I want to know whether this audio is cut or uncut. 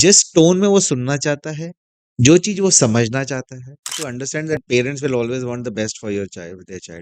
cut